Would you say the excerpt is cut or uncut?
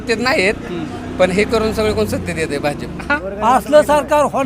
cut